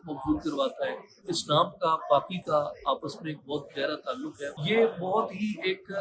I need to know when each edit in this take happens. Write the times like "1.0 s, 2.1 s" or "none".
1.2 s, 4.6 s